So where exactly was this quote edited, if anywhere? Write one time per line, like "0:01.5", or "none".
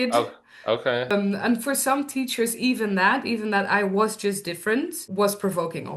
0:01.1
0:05.0